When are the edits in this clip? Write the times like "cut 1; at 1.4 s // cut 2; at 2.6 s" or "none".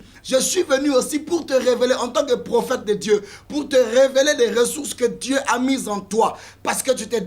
none